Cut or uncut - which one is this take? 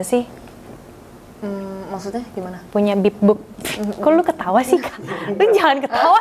uncut